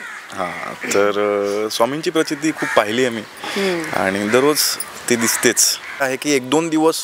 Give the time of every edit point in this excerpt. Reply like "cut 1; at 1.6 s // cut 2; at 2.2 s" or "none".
cut 1; at 6.1 s

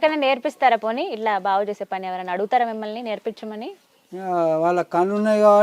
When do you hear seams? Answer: cut 1; at 3.8 s

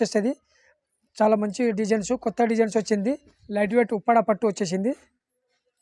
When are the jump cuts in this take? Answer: cut 1; at 3.3 s

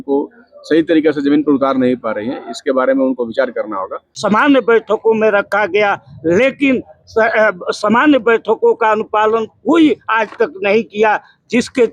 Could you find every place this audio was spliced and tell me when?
cut 1; at 4.1 s

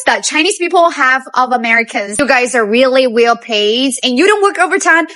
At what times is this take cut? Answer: cut 1; at 2.2 s

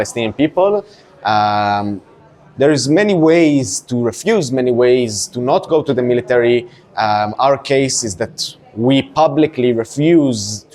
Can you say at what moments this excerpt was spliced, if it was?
none

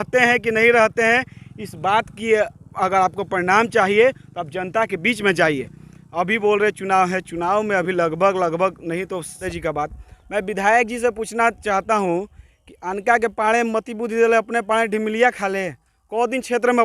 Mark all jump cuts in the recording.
cut 1; at 9.4 s

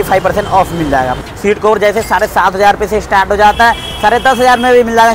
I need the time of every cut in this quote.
cut 1; at 1.2 s

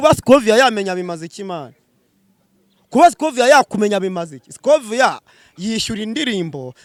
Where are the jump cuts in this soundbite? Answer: none

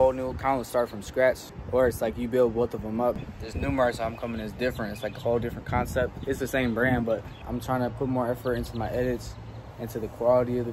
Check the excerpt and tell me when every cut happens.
cut 1; at 1.5 s // cut 2; at 3.3 s // cut 3; at 7.4 s

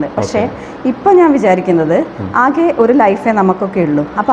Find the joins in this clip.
none

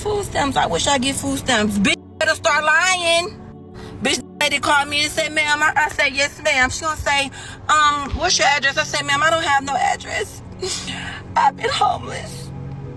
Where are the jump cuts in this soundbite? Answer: none

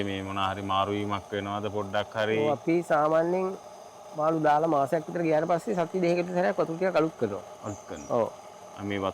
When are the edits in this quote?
none

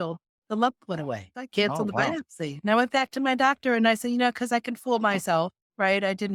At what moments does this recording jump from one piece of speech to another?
cut 1; at 1.3 s

